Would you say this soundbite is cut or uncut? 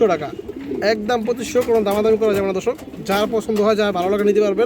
uncut